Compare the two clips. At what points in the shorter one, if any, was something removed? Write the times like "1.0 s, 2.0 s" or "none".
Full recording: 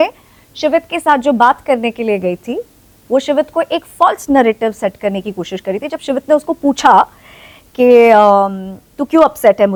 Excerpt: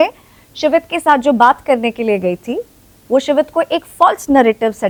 none